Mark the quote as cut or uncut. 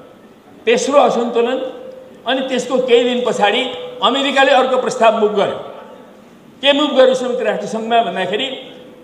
uncut